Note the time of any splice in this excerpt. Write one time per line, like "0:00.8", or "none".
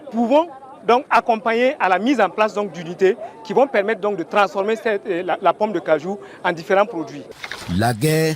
0:07.4